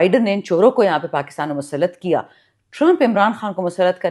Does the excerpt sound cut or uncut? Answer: uncut